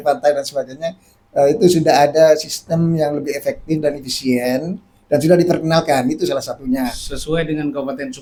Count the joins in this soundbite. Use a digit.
0